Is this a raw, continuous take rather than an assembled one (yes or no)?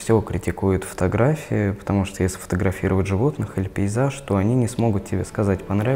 yes